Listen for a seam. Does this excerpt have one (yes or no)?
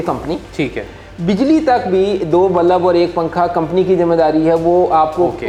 no